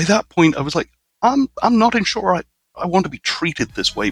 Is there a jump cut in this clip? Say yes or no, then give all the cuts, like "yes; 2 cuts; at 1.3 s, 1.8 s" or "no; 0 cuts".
no; 0 cuts